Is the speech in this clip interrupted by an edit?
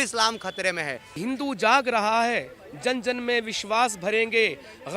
yes; 1 cut; at 1.2 s

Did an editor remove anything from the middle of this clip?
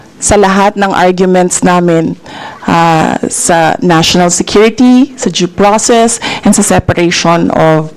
no; 0 cuts

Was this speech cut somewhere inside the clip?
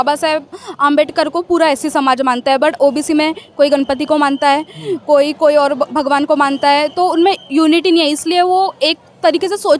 no; 0 cuts

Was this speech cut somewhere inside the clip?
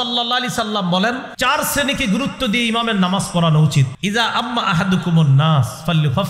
yes; 2 cuts; at 1.3 s, 3.9 s

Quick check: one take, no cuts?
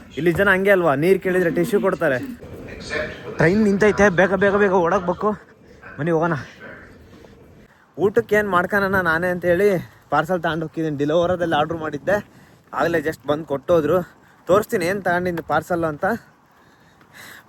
yes; 0 cuts

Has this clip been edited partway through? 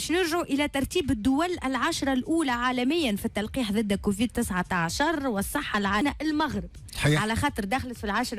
yes; 1 cut; at 6.0 s

